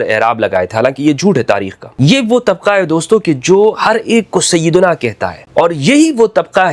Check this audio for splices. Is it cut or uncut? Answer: cut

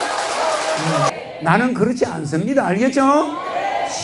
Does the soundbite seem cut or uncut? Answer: cut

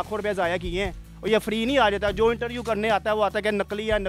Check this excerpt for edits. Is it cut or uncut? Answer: uncut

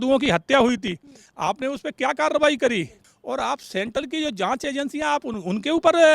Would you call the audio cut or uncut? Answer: cut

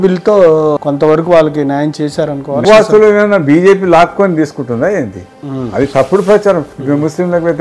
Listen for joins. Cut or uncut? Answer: cut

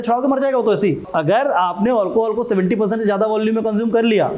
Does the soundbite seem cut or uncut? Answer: cut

